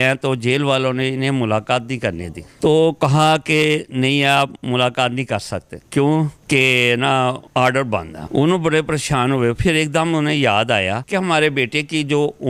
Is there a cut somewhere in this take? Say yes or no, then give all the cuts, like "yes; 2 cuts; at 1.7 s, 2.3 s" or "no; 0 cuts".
no; 0 cuts